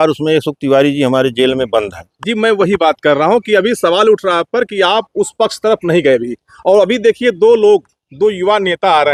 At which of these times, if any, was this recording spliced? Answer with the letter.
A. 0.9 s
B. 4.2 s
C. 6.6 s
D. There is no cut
D